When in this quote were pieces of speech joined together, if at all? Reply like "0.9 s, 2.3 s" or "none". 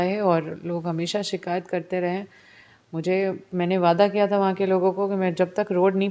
none